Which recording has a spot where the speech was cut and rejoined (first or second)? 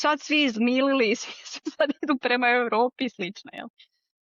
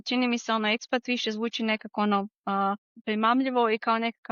second